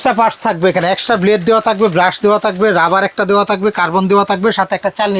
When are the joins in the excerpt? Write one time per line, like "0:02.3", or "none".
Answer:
none